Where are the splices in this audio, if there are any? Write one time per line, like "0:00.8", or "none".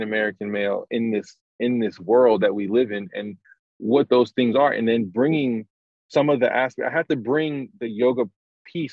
none